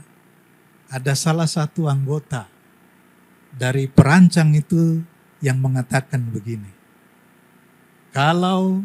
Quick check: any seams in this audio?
no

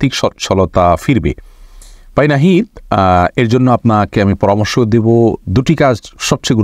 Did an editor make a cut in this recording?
no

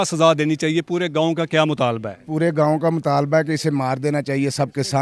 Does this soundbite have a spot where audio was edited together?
no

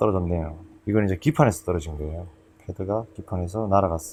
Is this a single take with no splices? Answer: yes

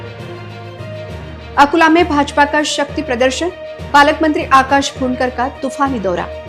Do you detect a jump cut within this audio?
no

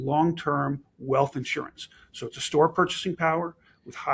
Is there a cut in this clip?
no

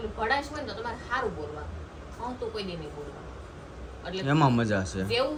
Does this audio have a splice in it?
no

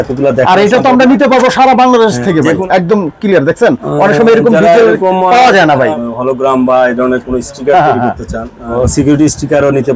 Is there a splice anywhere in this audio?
yes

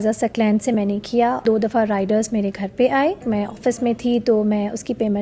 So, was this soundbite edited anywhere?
yes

